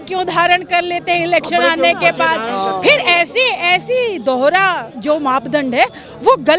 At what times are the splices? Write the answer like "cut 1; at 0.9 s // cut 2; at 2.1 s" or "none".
none